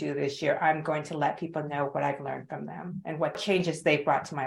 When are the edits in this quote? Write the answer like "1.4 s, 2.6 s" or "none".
3.4 s